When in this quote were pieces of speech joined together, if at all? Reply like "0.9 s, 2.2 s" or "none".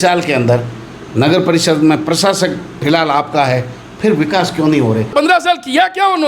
5.1 s